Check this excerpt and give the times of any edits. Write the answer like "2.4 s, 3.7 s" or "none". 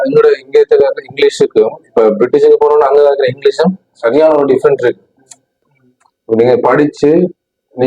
5.7 s